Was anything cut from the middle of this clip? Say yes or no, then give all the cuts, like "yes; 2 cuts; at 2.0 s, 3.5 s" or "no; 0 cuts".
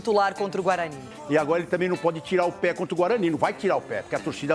yes; 1 cut; at 1.1 s